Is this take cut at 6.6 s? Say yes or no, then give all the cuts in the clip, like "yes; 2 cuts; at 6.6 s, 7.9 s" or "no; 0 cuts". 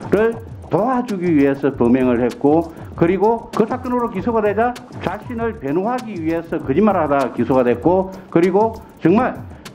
no; 2 cuts; at 3.5 s, 4.9 s